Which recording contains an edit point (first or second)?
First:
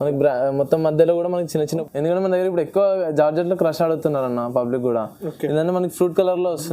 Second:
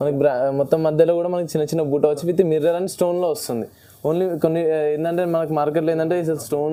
first